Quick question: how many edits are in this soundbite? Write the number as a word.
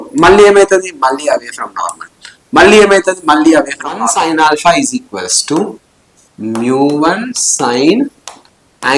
one